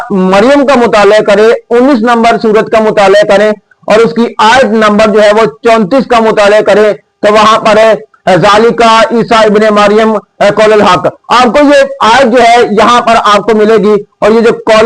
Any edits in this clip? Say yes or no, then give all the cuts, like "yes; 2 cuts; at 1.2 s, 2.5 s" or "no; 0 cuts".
no; 0 cuts